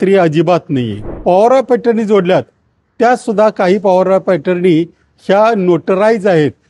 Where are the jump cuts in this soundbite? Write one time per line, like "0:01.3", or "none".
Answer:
0:01.1